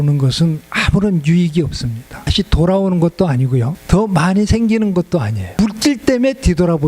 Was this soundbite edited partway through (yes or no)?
yes